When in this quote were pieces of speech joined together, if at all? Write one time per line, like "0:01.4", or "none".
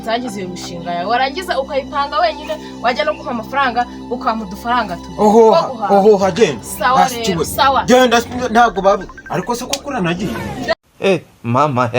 0:10.7